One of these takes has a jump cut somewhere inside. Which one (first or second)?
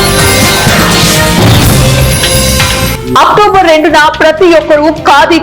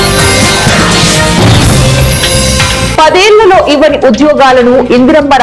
first